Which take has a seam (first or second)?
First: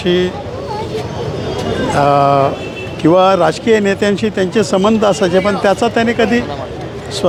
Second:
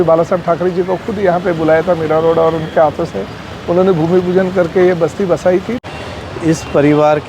second